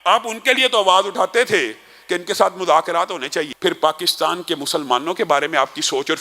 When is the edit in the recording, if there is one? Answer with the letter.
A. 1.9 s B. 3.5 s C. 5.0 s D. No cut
B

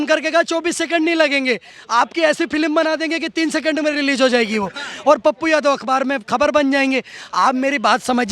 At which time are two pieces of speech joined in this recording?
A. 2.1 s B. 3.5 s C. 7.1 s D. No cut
D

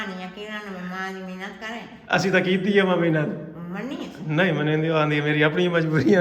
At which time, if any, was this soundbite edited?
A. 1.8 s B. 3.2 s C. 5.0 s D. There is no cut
D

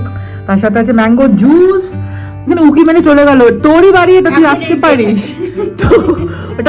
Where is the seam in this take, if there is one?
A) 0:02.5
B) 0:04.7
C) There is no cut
A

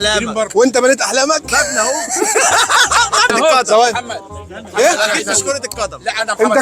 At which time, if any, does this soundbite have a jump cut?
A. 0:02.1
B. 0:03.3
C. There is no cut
B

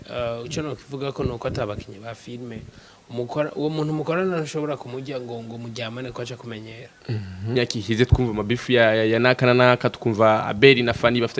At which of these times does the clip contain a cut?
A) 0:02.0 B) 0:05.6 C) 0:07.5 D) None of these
C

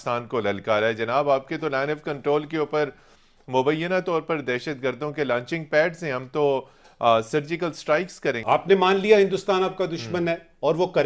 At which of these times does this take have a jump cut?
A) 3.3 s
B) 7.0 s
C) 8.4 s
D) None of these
C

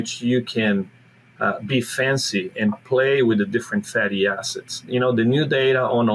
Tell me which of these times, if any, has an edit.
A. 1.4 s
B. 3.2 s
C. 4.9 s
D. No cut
C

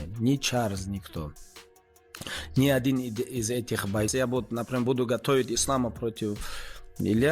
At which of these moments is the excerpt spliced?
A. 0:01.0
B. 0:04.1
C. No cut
B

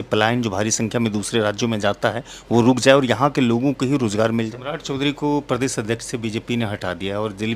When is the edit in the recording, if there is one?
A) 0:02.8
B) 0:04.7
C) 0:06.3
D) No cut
B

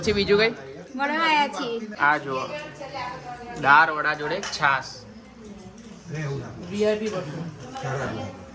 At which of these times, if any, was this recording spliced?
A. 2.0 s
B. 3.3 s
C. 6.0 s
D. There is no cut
A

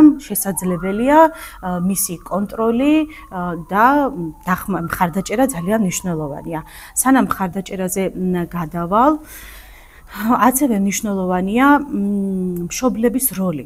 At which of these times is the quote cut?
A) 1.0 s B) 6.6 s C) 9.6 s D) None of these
D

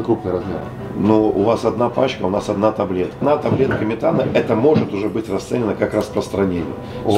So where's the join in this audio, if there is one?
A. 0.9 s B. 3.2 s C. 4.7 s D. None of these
B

